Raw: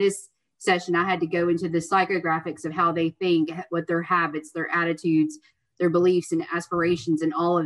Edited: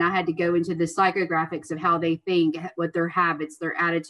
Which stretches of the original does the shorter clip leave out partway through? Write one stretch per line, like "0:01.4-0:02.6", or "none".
none

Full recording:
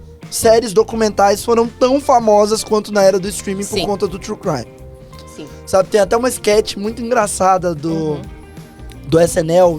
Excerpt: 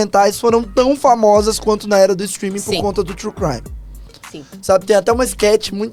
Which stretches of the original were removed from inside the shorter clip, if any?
none

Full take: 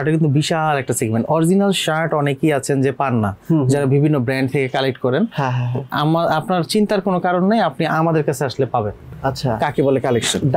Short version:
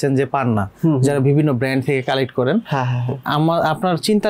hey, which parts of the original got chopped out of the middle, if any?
none

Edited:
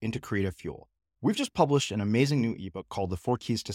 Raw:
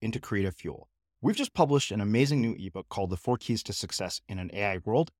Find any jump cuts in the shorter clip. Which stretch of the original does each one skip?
none

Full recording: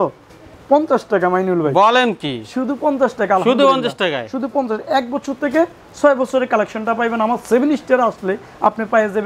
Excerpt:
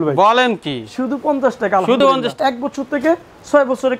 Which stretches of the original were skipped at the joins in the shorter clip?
0:03.6-0:04.5

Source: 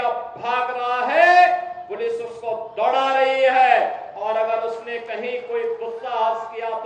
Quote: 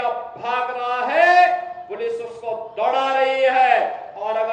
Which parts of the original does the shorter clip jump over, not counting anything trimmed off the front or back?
none

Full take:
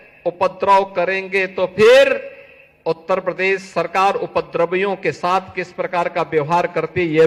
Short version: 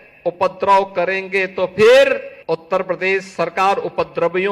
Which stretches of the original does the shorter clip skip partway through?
0:02.3-0:02.7

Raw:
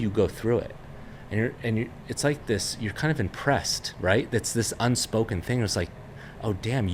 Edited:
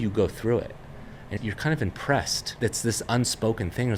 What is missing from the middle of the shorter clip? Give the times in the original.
0:01.3-0:02.7
0:03.9-0:04.3

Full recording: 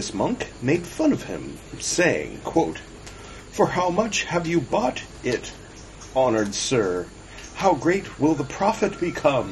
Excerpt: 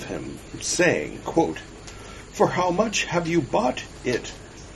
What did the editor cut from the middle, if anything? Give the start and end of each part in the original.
none

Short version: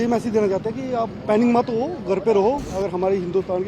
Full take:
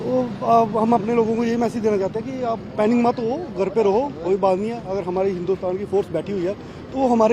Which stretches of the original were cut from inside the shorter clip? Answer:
0:04.2-0:04.8

